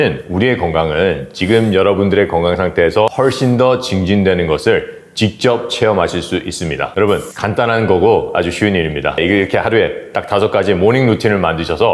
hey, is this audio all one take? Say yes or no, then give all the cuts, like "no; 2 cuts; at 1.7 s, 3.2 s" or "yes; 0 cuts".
no; 1 cut; at 3.1 s